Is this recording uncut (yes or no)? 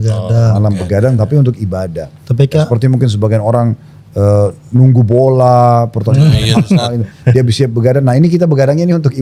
yes